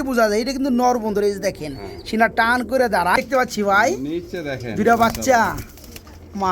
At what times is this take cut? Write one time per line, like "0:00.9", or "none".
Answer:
0:03.2